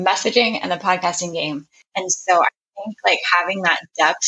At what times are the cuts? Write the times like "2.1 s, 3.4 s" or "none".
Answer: 1.8 s